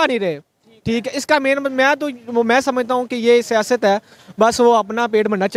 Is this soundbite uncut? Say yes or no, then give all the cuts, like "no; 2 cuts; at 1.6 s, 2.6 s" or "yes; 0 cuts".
yes; 0 cuts